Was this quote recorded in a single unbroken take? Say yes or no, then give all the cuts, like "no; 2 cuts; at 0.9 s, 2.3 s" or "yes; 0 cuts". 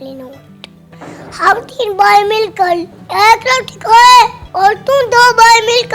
no; 2 cuts; at 0.9 s, 4.4 s